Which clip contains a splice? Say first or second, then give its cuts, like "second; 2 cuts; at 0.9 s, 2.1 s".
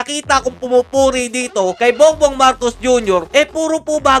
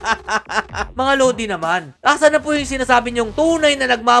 second; 1 cut; at 0.9 s